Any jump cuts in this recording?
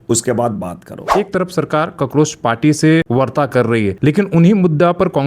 yes; 3 cuts; at 1.0 s, 3.1 s, 4.0 s

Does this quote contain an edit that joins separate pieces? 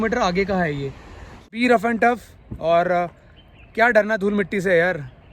yes; 1 cut; at 1.5 s

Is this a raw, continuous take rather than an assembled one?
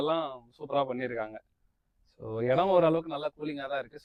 yes; 0 cuts

